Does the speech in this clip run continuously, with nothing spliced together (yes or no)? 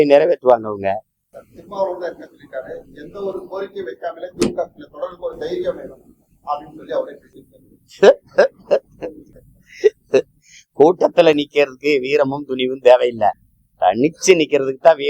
yes